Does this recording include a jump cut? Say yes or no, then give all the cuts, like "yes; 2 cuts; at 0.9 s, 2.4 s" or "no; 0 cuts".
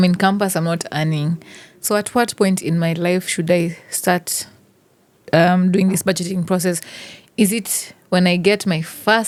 no; 0 cuts